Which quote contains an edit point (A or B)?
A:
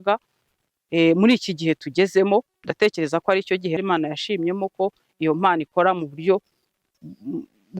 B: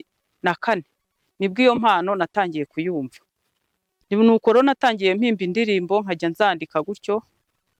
A